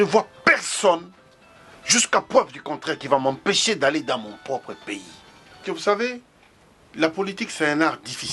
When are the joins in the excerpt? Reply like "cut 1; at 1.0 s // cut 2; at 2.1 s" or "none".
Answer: cut 1; at 5.7 s